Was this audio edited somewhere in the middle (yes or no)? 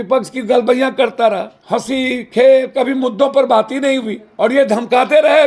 yes